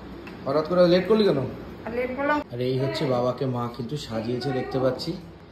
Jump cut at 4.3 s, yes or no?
no